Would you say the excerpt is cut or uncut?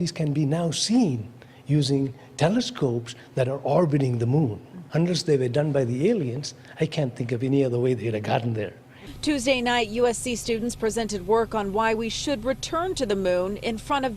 cut